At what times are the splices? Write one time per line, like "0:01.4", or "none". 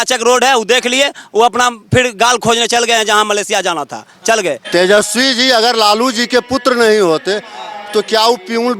0:04.6

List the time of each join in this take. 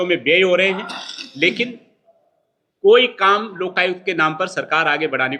none

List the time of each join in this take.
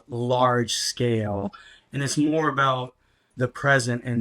0:03.3

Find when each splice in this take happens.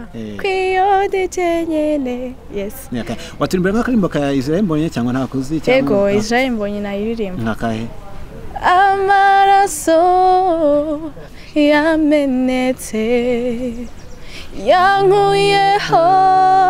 none

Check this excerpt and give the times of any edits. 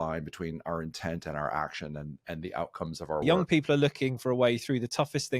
0:03.2

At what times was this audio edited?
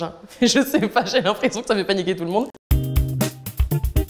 0:02.6

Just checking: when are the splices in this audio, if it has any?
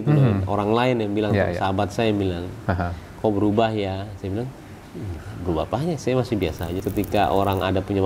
0:06.8

